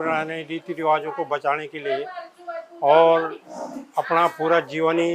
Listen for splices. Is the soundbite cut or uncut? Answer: uncut